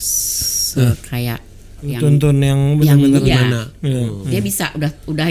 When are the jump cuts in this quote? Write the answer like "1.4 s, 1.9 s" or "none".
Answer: 1.9 s, 3.2 s